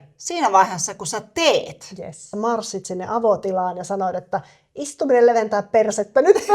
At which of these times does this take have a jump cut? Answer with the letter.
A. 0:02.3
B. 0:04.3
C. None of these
A